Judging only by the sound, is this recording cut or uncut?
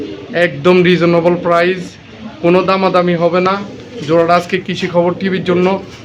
uncut